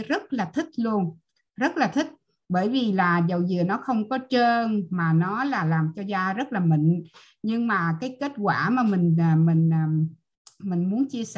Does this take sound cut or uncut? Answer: uncut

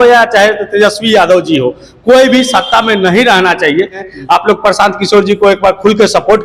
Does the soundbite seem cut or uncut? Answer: cut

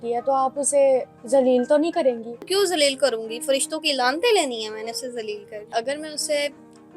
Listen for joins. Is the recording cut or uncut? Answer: cut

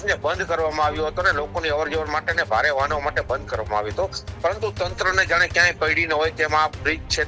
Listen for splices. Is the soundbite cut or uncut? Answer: uncut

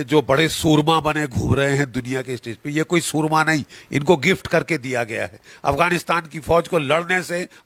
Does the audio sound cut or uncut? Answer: uncut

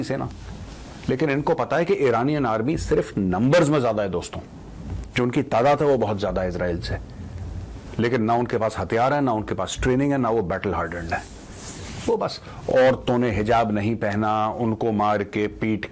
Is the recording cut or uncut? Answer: uncut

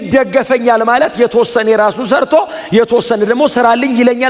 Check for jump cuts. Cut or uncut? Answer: uncut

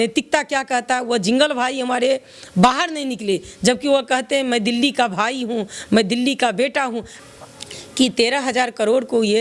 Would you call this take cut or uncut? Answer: cut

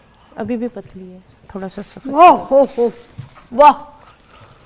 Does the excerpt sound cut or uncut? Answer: uncut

